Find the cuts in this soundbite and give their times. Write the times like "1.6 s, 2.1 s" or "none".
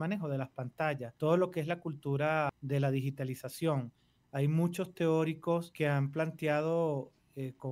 1.1 s, 2.6 s, 5.7 s